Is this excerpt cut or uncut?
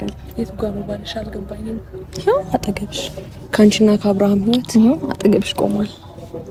uncut